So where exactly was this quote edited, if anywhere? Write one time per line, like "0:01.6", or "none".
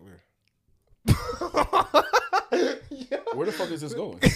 none

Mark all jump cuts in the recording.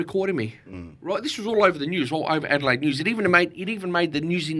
none

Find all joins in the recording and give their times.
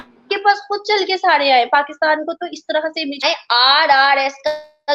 0:03.2

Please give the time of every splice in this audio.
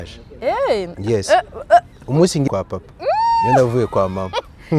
none

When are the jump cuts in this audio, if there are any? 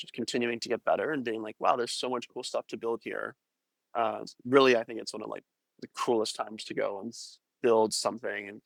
none

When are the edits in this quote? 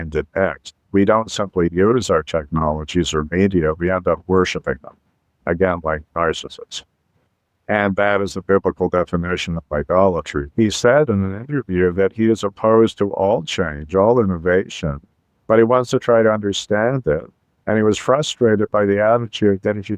0:00.8
0:10.4

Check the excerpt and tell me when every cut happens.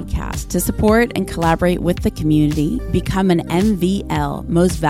none

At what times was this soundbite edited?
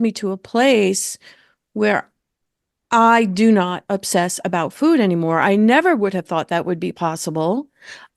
none

